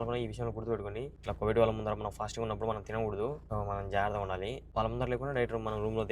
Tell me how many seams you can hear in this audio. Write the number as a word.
three